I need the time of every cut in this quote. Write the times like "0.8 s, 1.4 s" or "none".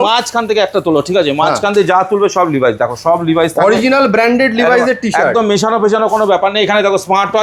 none